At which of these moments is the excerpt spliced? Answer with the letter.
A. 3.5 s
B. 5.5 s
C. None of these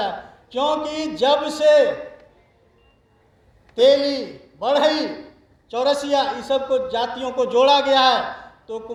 C